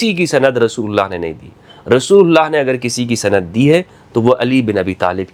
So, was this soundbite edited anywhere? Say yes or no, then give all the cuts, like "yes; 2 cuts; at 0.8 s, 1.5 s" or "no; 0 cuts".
no; 0 cuts